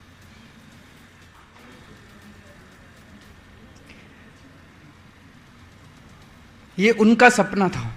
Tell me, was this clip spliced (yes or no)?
yes